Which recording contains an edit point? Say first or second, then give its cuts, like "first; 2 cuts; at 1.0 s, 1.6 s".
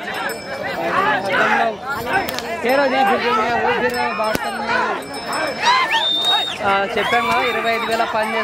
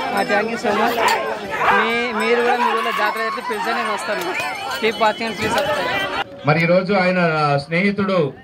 second; 1 cut; at 6.1 s